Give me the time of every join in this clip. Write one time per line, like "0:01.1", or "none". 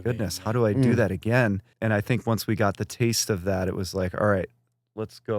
0:01.7